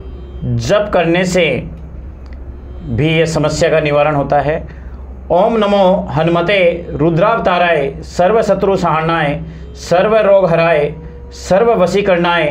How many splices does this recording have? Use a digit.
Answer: 0